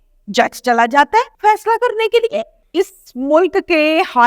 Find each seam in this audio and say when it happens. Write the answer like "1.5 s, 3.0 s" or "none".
1.3 s, 2.6 s

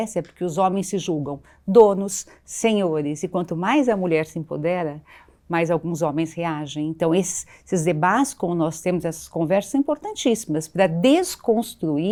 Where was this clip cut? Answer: none

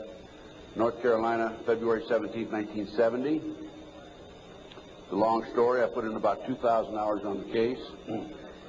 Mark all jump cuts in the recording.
4.8 s

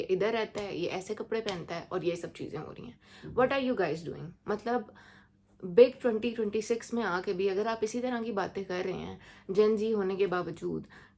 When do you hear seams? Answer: none

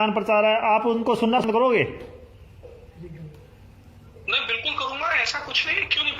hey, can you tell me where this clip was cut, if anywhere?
1.4 s

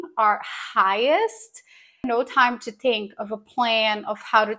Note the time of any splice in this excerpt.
2.0 s

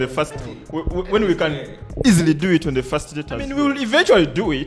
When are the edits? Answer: 3.5 s

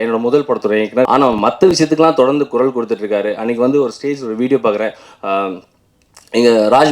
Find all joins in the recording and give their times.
1.1 s

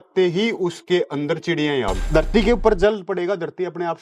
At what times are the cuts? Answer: 2.0 s

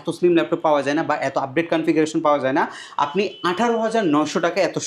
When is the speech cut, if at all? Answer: none

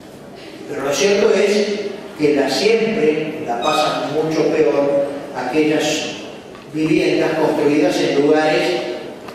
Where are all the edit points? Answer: 1.7 s

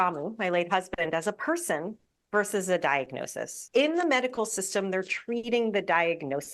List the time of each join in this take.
3.6 s

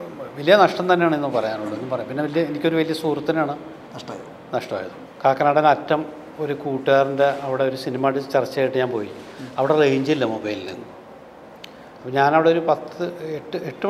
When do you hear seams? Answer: 5.0 s

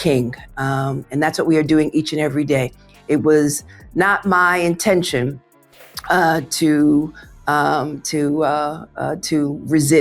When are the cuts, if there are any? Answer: none

